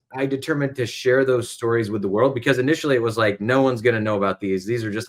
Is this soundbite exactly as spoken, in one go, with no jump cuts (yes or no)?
yes